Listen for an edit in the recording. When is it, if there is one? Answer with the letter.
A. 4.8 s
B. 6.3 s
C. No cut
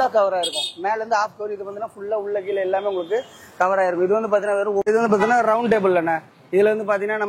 A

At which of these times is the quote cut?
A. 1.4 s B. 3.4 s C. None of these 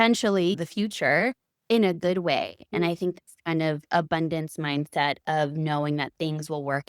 C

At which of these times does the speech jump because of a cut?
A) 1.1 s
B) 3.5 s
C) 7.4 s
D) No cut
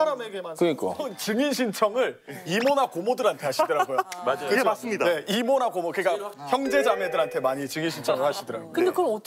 A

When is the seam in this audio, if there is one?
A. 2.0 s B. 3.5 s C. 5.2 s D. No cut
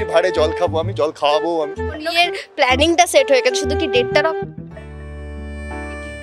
A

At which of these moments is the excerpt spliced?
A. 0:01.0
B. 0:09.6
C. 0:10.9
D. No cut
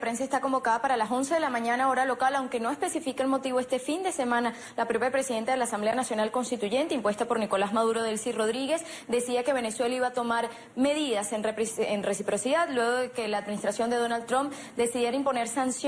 D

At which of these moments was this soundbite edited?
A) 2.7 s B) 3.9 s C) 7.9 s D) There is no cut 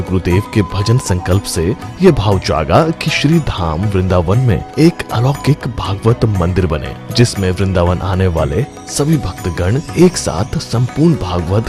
D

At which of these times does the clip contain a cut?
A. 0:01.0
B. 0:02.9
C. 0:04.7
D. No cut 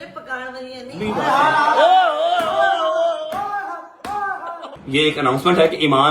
C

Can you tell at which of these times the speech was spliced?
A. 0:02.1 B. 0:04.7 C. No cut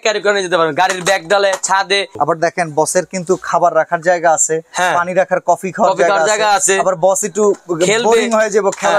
A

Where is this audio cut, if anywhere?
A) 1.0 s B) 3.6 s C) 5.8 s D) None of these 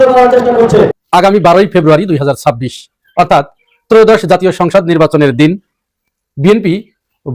A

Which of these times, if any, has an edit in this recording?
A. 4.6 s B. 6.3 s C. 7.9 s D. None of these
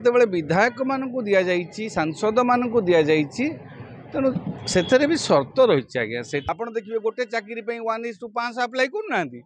B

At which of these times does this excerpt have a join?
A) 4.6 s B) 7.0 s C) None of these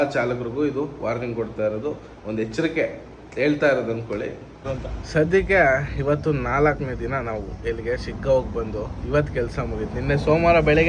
A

